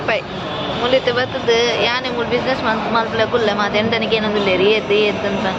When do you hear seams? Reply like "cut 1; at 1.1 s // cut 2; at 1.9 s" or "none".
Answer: none